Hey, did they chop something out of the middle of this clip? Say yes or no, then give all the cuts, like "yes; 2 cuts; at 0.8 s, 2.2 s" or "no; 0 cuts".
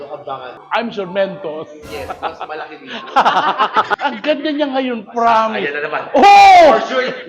yes; 1 cut; at 4.0 s